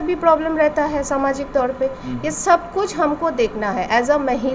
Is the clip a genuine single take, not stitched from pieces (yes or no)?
yes